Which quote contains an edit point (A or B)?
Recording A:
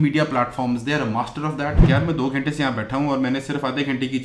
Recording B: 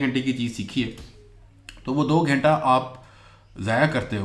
A